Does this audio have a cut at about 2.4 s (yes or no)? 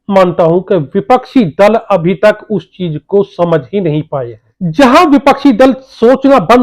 no